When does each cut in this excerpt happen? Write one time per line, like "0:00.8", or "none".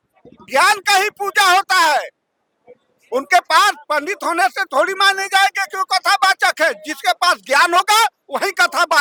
none